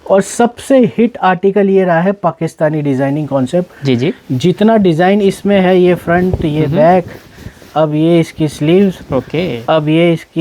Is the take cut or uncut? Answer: uncut